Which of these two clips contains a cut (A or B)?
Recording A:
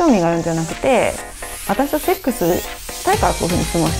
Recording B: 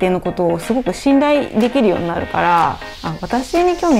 B